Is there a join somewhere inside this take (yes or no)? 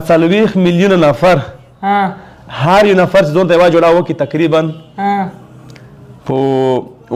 no